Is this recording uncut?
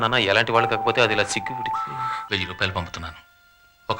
no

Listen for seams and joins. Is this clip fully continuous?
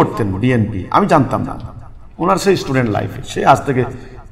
yes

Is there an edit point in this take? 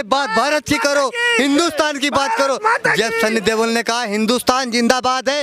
no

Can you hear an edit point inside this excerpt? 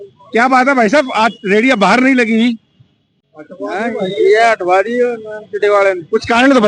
no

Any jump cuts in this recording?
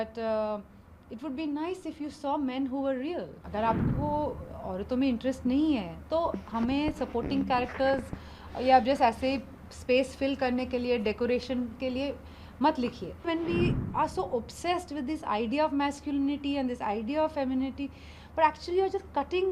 yes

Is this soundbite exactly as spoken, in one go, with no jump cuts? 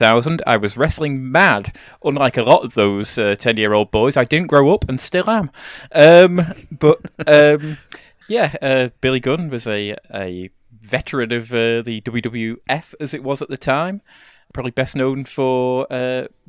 no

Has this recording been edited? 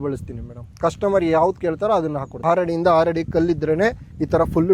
yes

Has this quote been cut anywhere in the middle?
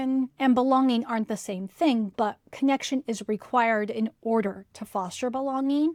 no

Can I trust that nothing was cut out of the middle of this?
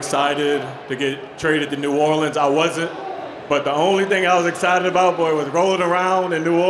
yes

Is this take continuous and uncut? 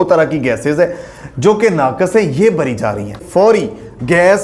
no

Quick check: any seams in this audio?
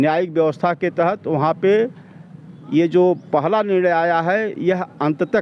no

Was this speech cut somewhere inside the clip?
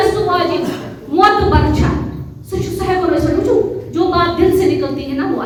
no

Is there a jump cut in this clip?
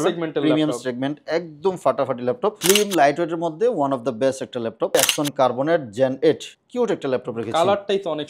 yes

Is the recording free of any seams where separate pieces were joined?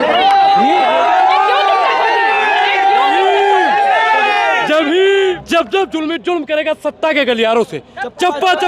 no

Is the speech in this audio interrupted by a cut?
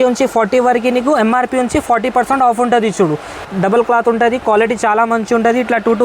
yes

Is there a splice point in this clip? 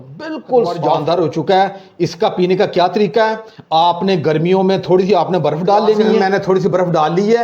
yes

